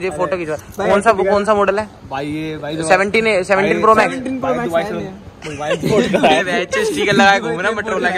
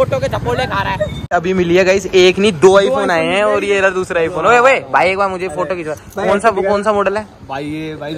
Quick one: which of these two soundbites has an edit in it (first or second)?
second